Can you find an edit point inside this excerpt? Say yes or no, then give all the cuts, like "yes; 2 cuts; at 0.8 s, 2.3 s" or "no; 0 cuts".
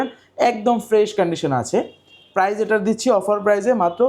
no; 0 cuts